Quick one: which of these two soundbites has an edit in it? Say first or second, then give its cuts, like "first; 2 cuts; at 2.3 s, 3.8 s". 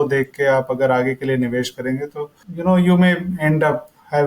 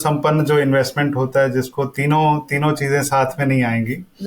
first; 1 cut; at 2.4 s